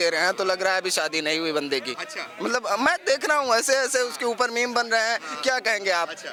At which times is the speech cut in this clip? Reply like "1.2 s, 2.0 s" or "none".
none